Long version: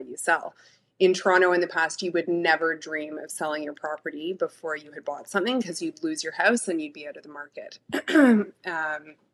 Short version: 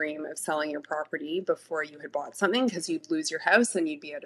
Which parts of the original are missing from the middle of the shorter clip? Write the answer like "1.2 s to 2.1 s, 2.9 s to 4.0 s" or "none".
none